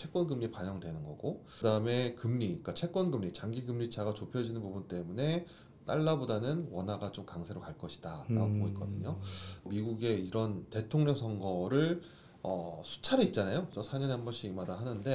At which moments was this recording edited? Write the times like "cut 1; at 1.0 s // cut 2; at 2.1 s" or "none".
cut 1; at 1.5 s // cut 2; at 9.7 s

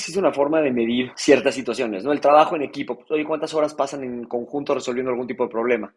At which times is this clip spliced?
cut 1; at 1.1 s

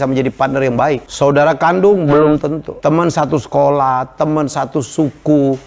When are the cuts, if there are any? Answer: cut 1; at 1.1 s // cut 2; at 2.7 s

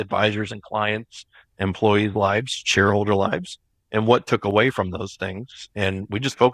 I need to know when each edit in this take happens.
none

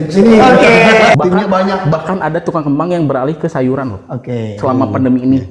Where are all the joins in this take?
cut 1; at 1.2 s

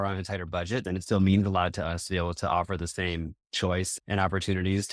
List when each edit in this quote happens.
cut 1; at 0.8 s // cut 2; at 3.9 s

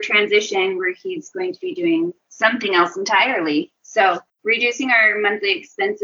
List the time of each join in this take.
cut 1; at 4.3 s

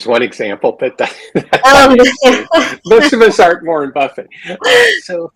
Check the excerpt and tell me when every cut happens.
none

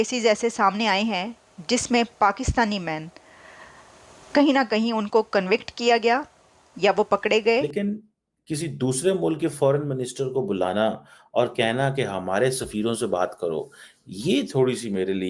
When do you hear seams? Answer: cut 1; at 7.7 s

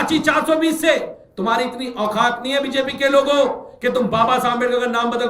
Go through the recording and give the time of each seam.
cut 1; at 1.2 s

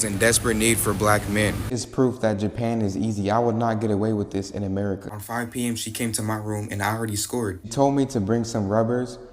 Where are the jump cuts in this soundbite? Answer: cut 1; at 1.8 s // cut 2; at 5.2 s // cut 3; at 7.7 s

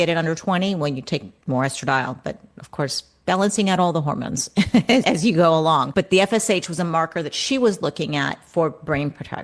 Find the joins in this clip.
cut 1; at 1.3 s // cut 2; at 5.9 s

